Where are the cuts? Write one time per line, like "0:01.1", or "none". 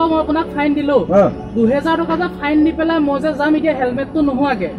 none